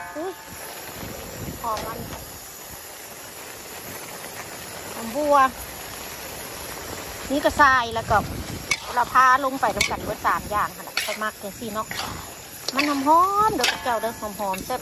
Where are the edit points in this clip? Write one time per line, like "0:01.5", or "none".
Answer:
none

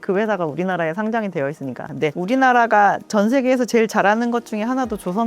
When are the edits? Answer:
0:01.8

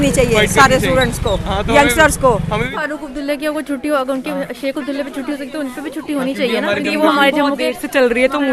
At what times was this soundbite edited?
0:02.7

